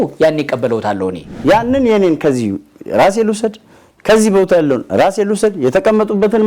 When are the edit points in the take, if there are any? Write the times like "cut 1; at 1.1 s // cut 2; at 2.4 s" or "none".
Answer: cut 1; at 1.3 s